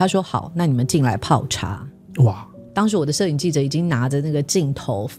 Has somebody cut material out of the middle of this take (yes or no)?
no